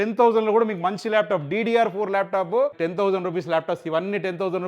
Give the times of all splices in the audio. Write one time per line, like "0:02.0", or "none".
0:02.8